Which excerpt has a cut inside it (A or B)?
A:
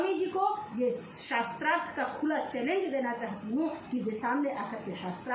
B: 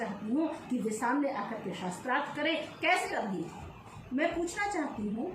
B